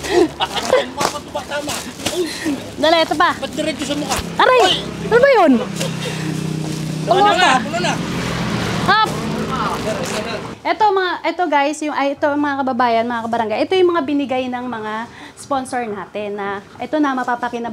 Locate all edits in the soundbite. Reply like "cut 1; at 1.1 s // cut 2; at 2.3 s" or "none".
cut 1; at 10.5 s